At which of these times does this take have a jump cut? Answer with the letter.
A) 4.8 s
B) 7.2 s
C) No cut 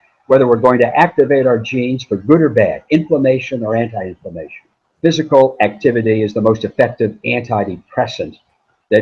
A